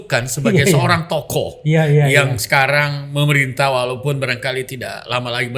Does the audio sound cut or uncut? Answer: uncut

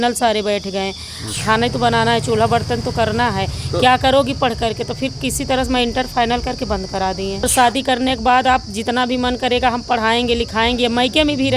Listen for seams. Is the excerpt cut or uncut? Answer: cut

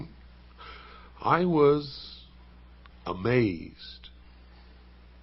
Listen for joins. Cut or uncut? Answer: uncut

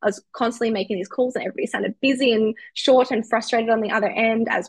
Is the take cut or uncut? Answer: uncut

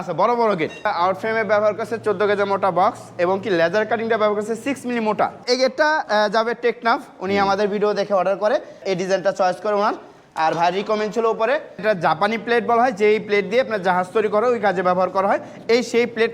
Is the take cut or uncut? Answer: cut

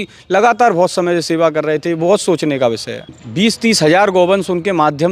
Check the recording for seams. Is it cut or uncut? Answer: cut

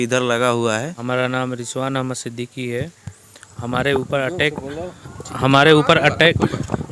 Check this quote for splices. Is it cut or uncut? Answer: cut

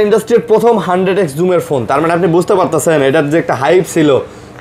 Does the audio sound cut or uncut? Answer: uncut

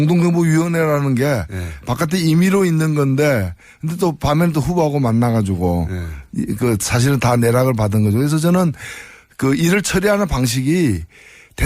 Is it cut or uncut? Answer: cut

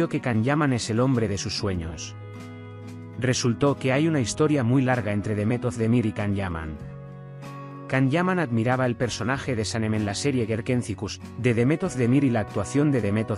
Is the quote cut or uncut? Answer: cut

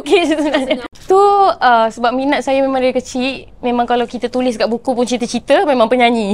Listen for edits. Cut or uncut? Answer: cut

